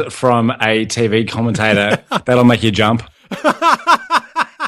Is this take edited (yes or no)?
no